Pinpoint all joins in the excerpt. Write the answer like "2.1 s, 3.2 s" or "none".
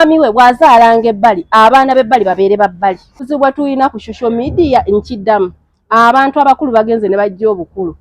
3.3 s